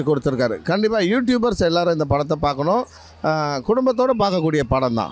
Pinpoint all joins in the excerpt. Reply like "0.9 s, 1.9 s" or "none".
none